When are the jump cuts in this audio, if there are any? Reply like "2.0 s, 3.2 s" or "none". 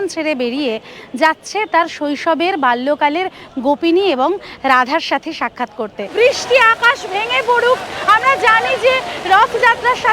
6.1 s